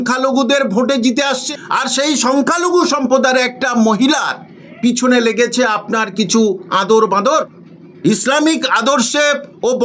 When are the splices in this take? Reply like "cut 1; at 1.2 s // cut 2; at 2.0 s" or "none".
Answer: cut 1; at 1.4 s // cut 2; at 7.2 s